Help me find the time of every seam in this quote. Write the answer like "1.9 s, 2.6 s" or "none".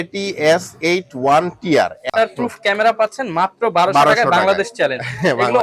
2.1 s